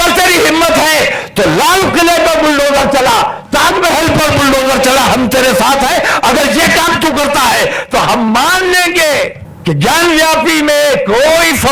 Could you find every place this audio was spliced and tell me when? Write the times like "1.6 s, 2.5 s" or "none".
9.5 s